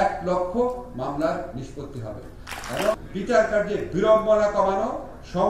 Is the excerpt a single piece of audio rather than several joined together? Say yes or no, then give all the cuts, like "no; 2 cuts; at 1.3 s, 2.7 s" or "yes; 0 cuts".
no; 1 cut; at 2.9 s